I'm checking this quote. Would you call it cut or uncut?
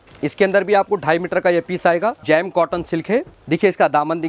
cut